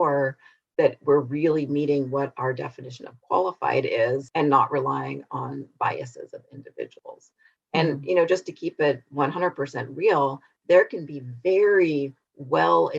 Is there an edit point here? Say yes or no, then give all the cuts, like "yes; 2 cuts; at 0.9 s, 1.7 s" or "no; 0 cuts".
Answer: yes; 1 cut; at 4.3 s